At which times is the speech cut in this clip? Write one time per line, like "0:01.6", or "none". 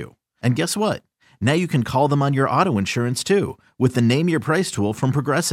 none